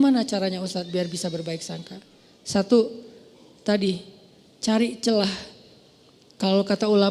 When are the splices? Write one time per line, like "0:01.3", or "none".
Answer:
none